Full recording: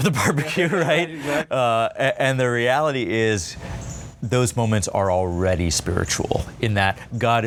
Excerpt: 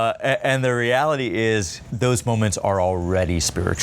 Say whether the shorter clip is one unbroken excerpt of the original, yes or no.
no